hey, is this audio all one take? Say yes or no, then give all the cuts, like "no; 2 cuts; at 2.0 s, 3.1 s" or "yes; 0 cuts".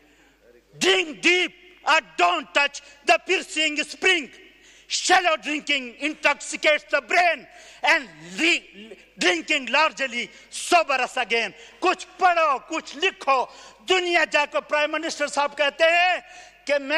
yes; 0 cuts